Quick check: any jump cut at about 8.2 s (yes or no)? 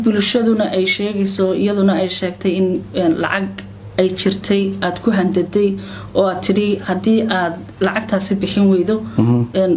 no